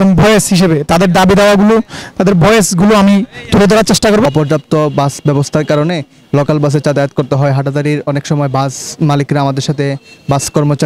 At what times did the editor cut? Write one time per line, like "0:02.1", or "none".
0:04.3

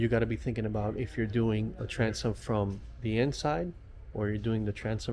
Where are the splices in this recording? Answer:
none

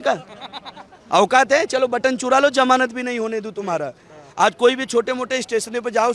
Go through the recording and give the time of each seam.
none

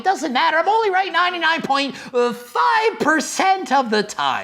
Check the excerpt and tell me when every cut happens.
none

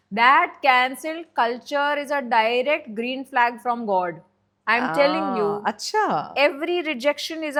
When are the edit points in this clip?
none

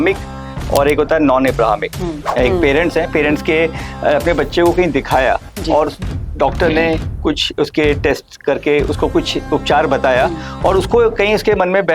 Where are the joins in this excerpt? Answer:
0:02.2

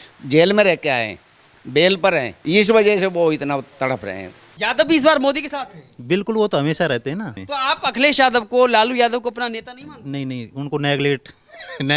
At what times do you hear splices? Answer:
0:02.3
0:04.4
0:07.4

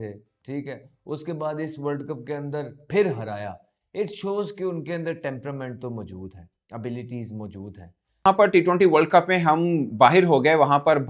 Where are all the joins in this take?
0:08.3

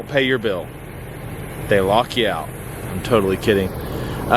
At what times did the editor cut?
none

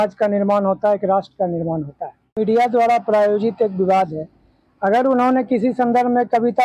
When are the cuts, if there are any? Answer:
0:02.4

